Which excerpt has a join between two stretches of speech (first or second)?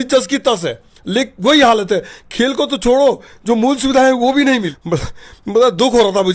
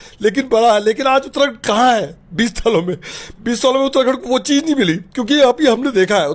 first